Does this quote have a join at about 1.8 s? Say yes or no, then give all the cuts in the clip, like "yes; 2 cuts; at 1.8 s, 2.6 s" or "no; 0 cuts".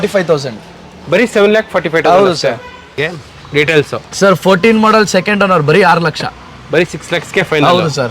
no; 1 cut; at 3.0 s